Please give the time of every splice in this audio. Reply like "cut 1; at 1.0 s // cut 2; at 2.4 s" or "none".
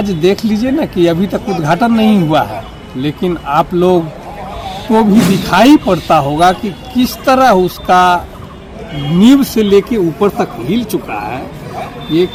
none